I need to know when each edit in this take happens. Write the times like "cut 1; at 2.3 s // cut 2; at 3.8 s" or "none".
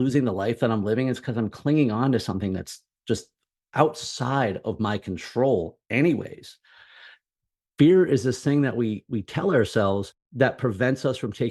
cut 1; at 10.2 s